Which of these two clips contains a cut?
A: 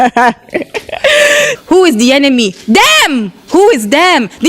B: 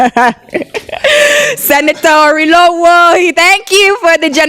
A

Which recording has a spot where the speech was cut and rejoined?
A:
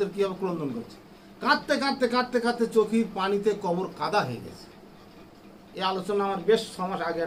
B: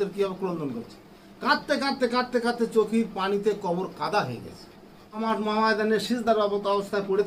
B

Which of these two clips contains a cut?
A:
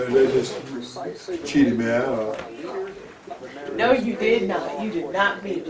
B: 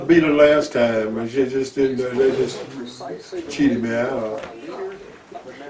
A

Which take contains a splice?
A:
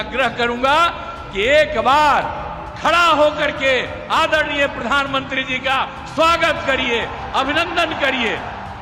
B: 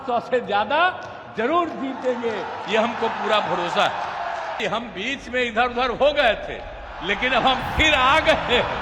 B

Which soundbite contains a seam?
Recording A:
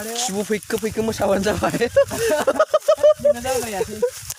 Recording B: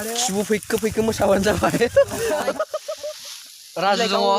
B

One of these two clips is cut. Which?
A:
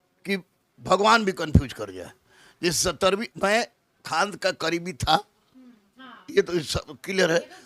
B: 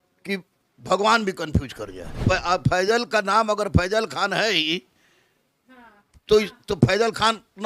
B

